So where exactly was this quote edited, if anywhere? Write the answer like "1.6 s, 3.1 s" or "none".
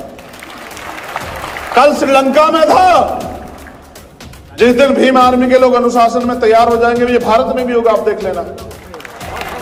none